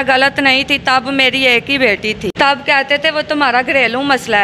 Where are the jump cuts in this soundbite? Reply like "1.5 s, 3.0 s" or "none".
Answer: 2.3 s